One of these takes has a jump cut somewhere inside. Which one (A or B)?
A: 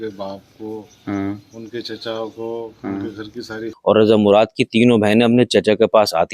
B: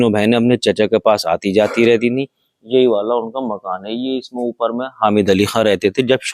A